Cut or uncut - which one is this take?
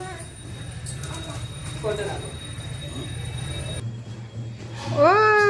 cut